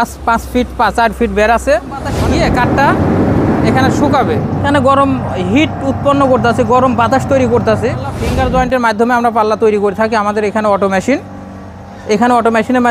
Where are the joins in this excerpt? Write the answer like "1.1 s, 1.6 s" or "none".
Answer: 2.1 s, 4.7 s, 8.2 s